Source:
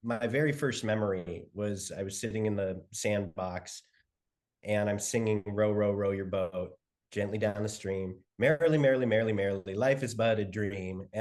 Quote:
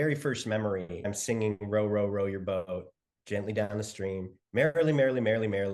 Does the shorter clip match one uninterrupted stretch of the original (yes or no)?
no